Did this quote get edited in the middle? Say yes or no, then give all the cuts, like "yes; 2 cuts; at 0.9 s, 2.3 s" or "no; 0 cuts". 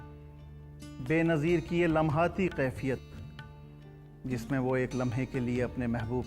yes; 1 cut; at 1.0 s